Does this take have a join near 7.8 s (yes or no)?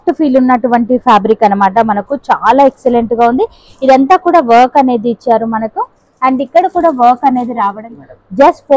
yes